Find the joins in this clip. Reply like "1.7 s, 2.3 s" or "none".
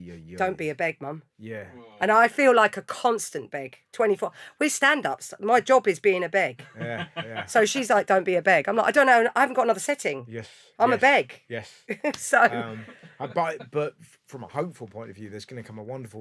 none